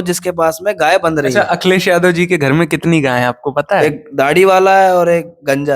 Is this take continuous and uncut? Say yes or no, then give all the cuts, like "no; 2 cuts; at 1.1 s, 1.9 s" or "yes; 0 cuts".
no; 2 cuts; at 1.3 s, 3.8 s